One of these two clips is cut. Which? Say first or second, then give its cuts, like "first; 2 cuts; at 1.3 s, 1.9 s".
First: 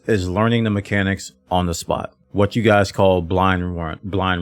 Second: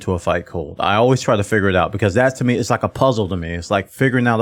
first; 1 cut; at 2.2 s